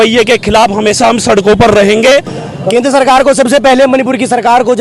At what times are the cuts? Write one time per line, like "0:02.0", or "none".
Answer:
0:02.4